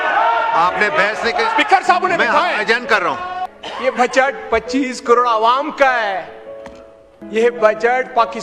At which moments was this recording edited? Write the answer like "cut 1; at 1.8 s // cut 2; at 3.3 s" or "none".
cut 1; at 3.5 s